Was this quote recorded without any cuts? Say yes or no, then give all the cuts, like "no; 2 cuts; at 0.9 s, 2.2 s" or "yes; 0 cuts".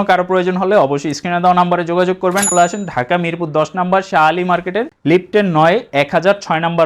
no; 1 cut; at 2.5 s